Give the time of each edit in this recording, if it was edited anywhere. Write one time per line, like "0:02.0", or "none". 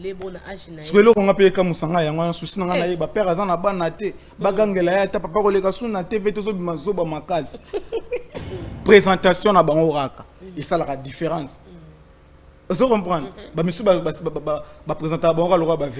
0:08.5